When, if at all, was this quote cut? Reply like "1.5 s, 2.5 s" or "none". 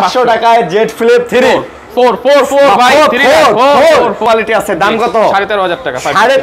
4.2 s

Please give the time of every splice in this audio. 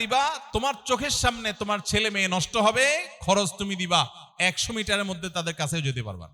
none

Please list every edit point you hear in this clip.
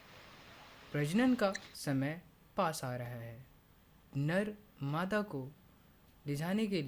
none

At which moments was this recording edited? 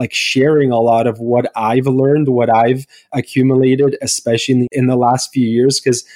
4.7 s

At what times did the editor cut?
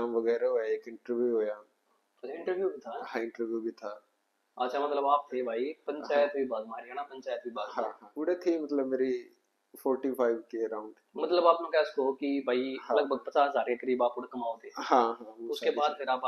8.0 s

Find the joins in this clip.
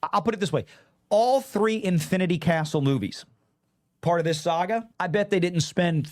4.9 s

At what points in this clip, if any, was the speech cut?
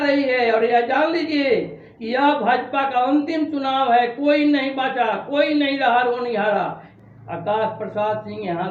6.8 s

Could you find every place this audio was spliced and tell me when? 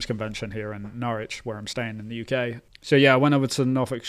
2.6 s

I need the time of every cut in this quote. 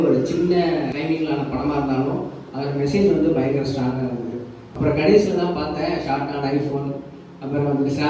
0.9 s, 4.7 s

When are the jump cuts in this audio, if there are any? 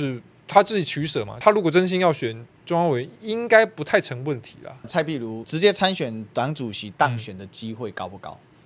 1.3 s, 5.1 s

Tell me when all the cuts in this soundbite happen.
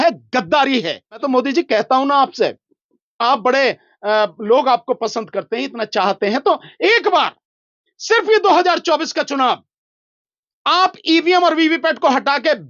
1.2 s

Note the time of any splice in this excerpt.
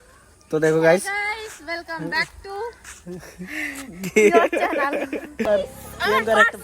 5.5 s

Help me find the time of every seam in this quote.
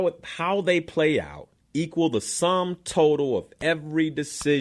none

